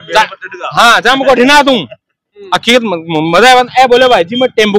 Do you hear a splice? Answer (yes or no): no